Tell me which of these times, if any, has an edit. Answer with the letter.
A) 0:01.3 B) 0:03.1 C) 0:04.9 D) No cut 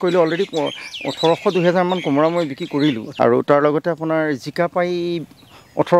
B